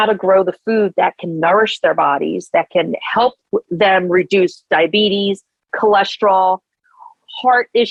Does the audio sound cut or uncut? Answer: uncut